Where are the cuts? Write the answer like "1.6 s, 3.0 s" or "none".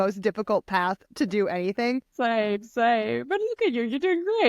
2.1 s